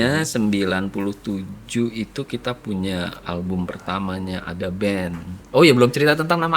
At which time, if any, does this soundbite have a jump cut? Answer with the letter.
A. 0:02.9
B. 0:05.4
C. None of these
B